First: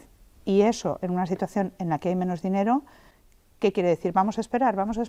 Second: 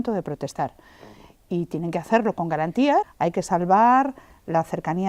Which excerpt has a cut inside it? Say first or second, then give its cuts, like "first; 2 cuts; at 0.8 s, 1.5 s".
second; 1 cut; at 3.1 s